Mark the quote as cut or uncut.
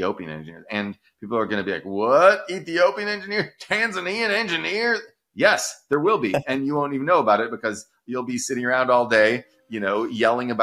cut